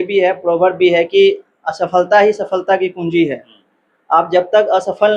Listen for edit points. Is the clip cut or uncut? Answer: uncut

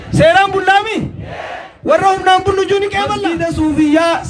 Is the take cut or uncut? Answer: cut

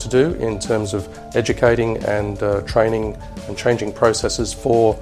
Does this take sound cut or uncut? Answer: uncut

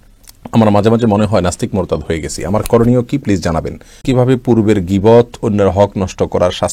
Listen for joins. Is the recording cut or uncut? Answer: cut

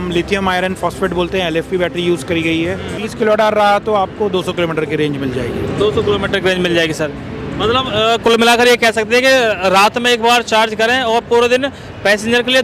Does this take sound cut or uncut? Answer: cut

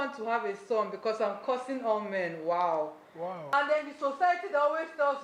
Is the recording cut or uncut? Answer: cut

